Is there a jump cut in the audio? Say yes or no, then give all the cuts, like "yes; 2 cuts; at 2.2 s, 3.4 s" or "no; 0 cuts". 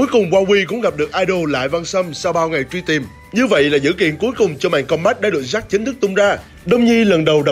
yes; 2 cuts; at 3.2 s, 6.5 s